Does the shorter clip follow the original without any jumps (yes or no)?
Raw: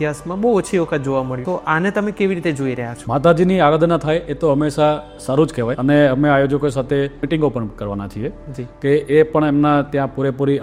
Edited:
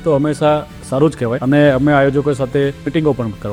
yes